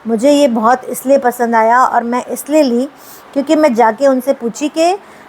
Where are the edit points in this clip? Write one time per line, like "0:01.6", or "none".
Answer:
none